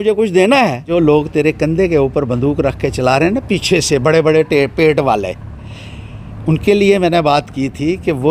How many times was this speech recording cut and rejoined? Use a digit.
1